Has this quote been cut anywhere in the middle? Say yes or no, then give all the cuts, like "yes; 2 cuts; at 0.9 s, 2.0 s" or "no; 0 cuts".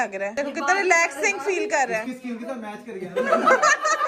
no; 0 cuts